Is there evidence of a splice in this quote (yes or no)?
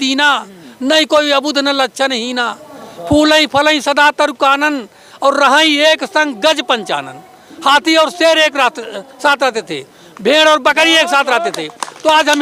no